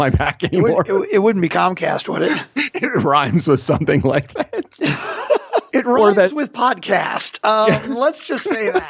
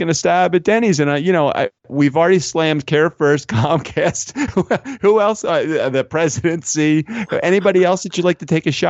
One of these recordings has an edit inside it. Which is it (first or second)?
first